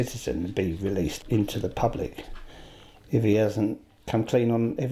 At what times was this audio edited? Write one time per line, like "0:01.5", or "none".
0:01.2
0:03.9